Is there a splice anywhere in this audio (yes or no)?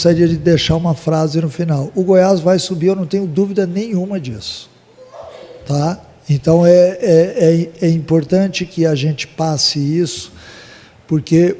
no